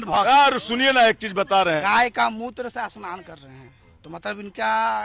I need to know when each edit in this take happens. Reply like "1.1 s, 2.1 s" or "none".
1.8 s, 3.8 s